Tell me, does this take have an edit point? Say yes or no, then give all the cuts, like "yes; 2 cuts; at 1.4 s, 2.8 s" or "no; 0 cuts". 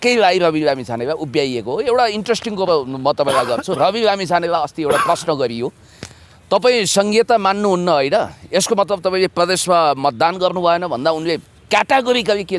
no; 0 cuts